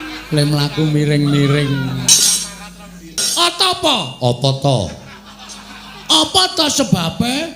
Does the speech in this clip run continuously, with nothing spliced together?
no; 1 cut; at 3.3 s

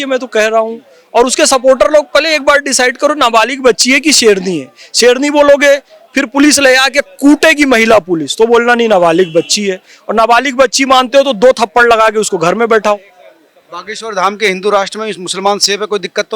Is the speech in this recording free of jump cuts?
yes; 0 cuts

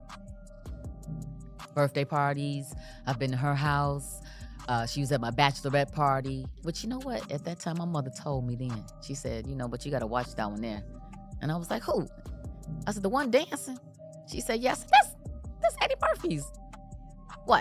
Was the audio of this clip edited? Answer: yes; 1 cut; at 1.6 s

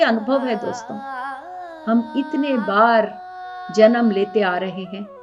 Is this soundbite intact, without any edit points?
yes; 0 cuts

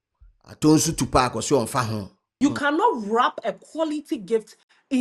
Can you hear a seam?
yes; 1 cut; at 2.2 s

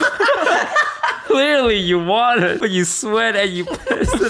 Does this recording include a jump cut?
yes; 2 cuts; at 1.2 s, 2.6 s

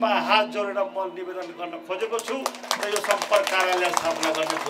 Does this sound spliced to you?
no; 0 cuts

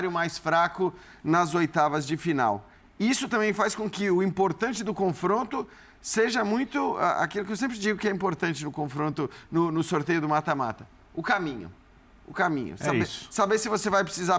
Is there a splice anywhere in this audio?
no; 0 cuts

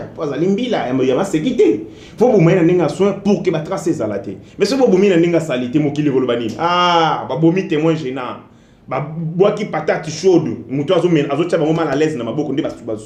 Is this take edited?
no; 0 cuts

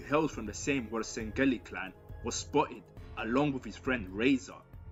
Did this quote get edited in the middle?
no; 0 cuts

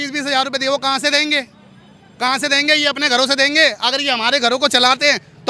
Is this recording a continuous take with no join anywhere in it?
yes; 0 cuts

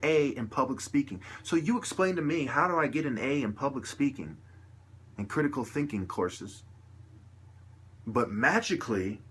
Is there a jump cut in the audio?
yes; 1 cut; at 5.7 s

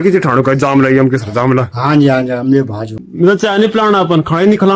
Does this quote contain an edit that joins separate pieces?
yes; 1 cut; at 2.8 s

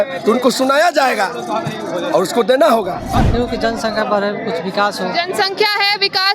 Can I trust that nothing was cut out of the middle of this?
no; 1 cut; at 3.3 s

